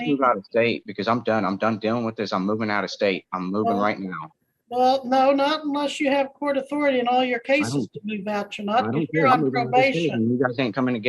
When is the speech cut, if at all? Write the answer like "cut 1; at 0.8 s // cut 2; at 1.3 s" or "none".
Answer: none